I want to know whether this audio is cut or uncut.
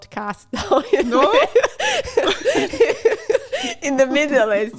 uncut